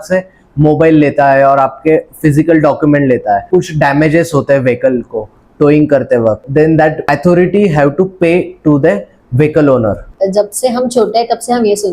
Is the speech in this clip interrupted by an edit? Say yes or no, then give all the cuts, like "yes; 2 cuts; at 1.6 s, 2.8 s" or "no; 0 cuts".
yes; 3 cuts; at 3.5 s, 6.4 s, 10.1 s